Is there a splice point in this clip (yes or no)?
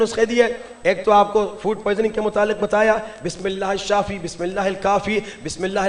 no